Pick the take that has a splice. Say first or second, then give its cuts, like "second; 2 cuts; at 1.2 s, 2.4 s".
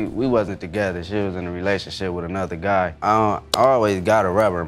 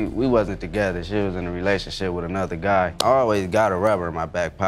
second; 1 cut; at 2.9 s